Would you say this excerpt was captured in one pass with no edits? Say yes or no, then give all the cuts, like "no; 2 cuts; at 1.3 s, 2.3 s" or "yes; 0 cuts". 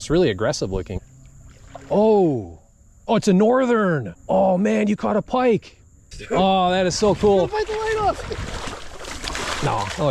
no; 3 cuts; at 1.0 s, 4.1 s, 6.1 s